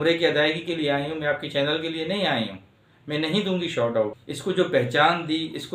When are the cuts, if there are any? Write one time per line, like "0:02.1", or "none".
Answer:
0:04.2